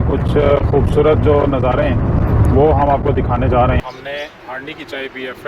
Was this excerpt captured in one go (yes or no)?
no